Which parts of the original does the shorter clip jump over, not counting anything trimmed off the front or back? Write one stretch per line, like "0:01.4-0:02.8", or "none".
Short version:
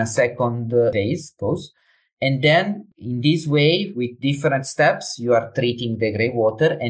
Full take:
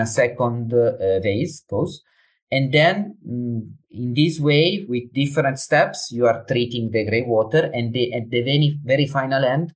0:00.9-0:01.2
0:03.2-0:03.8